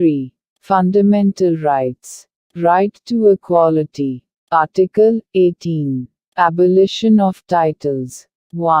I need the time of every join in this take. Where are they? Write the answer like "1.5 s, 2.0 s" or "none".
none